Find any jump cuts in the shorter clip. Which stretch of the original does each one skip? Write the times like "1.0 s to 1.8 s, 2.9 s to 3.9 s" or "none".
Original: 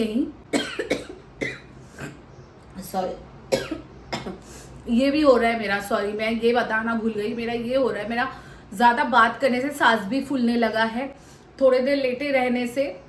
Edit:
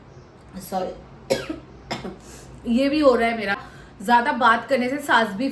5.8 s to 8.3 s